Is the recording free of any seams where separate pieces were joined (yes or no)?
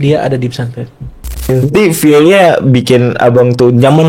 no